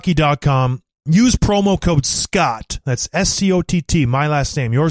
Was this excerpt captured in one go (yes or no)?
yes